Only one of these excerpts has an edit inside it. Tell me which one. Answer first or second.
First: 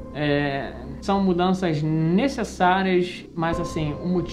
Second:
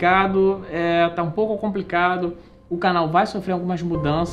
first